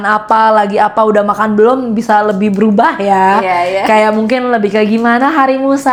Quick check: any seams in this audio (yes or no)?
no